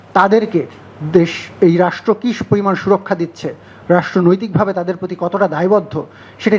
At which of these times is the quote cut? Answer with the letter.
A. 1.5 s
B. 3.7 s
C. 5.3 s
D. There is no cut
D